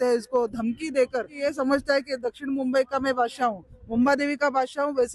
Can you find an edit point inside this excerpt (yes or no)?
yes